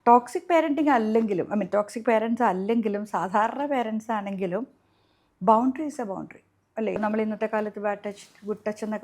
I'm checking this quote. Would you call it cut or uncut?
cut